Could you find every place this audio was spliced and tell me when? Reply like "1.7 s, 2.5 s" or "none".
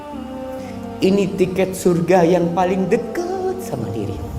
1.0 s